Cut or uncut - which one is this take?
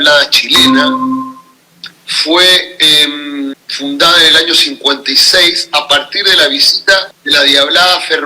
cut